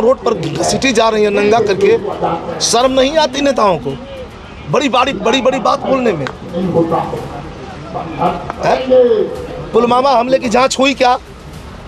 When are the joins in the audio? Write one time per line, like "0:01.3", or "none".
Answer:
none